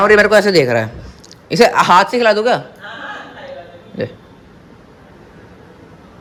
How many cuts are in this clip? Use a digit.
0